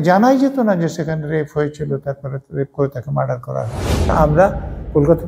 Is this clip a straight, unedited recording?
no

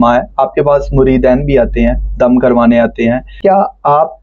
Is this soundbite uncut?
no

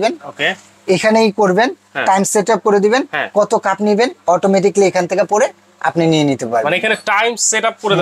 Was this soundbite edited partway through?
no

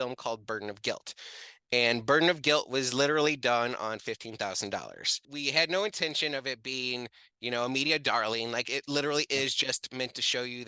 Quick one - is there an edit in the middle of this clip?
yes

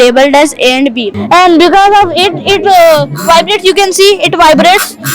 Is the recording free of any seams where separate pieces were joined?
no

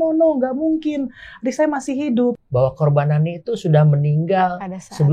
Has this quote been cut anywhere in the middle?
yes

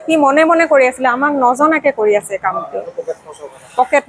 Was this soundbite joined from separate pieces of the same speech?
no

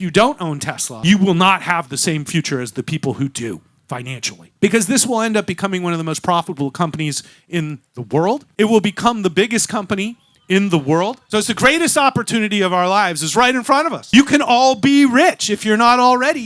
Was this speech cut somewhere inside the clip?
yes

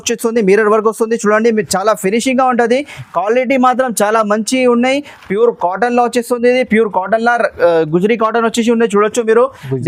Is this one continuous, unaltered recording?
yes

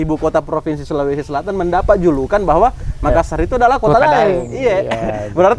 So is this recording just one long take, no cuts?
yes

